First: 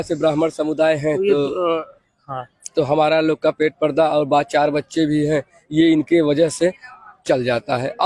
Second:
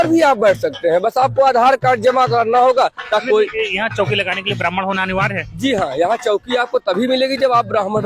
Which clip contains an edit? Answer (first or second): second